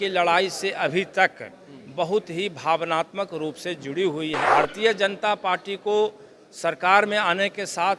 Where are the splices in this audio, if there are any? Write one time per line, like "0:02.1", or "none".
0:04.4